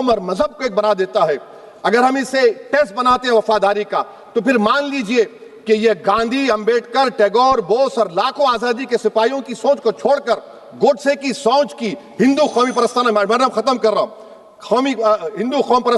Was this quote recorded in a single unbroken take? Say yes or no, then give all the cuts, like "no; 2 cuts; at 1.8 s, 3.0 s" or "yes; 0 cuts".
yes; 0 cuts